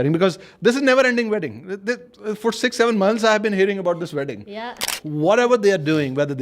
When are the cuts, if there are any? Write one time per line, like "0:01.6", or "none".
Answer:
0:04.8